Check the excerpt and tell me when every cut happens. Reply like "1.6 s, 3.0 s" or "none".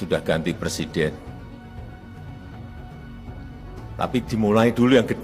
none